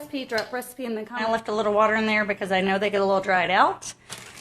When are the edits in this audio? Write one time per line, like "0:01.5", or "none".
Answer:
0:01.2